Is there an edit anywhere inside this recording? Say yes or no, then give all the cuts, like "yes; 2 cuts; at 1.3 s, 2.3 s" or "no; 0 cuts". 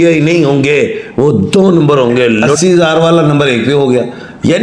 yes; 1 cut; at 2.4 s